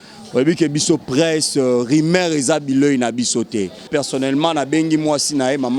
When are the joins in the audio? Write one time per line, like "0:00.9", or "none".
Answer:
0:03.9